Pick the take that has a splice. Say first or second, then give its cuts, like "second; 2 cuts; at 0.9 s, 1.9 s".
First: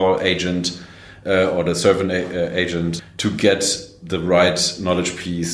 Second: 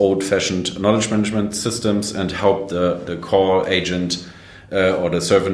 first; 1 cut; at 3.0 s